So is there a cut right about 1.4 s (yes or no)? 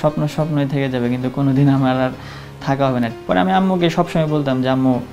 no